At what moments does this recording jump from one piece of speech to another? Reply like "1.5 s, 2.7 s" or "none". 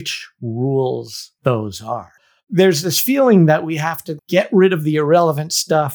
2.2 s, 4.1 s